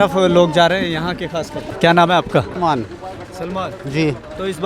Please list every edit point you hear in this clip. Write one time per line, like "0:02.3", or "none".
0:01.7
0:02.5